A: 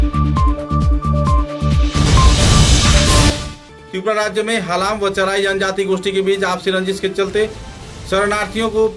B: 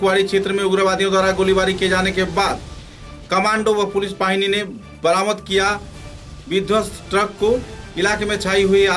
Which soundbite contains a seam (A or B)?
A